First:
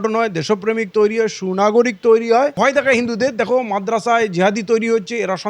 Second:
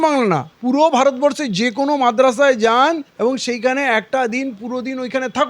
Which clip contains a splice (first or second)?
first